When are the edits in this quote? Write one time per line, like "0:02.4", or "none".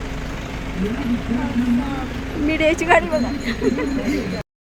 none